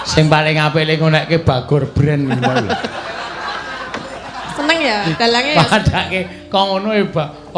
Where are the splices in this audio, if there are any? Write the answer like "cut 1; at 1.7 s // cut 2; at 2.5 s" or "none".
none